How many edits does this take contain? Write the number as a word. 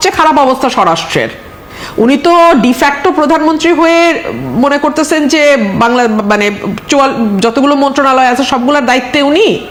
zero